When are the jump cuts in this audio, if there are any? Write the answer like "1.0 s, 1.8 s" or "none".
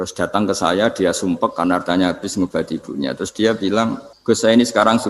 4.1 s